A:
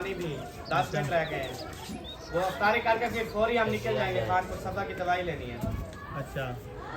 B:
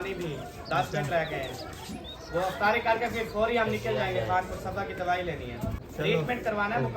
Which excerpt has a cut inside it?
B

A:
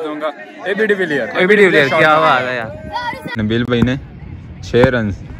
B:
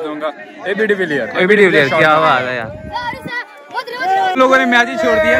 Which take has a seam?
A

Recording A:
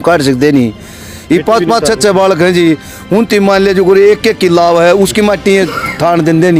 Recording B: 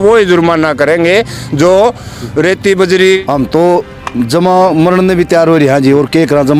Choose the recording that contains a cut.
B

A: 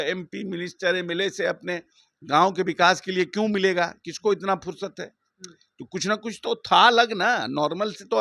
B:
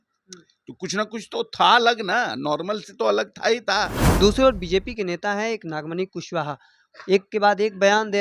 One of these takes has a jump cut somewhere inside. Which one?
B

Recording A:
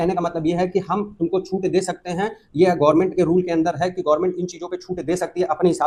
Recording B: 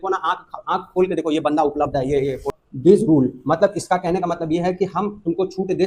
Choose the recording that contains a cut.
B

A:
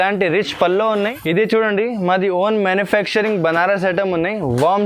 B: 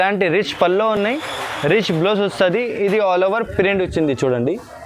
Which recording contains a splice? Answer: A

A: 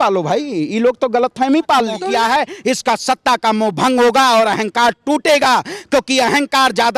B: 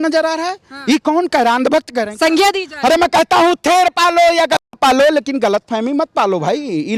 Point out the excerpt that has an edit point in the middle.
A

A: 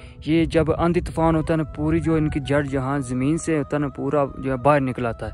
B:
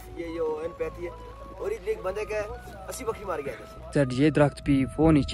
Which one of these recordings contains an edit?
B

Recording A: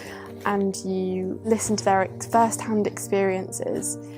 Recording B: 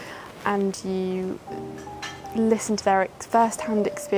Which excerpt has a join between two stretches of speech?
A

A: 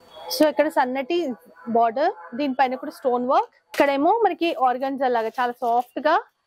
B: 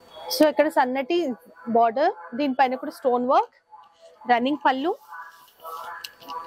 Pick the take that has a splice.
A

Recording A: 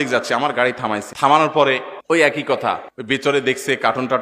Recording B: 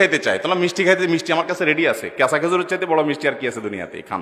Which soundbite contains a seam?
A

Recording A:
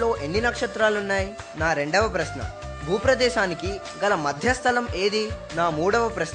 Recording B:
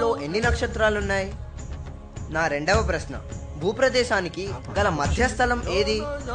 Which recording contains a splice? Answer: A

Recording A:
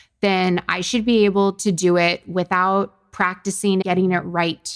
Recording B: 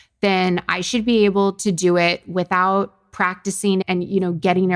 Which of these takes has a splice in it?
A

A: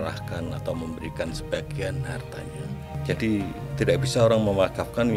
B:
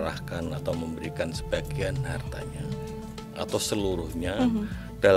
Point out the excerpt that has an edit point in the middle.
A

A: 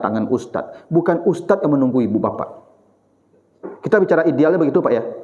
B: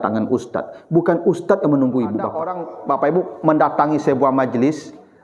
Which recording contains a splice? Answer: B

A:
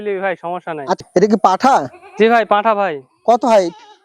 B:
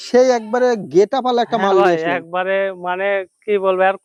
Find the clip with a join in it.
A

